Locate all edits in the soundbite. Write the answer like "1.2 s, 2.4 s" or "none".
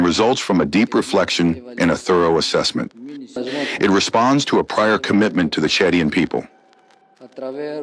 3.4 s